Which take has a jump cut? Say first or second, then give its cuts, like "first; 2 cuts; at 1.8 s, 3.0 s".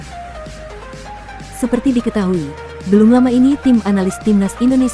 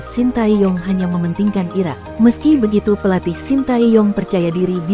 first; 1 cut; at 1.6 s